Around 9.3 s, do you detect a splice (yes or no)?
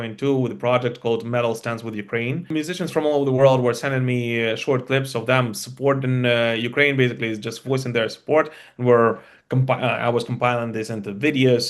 no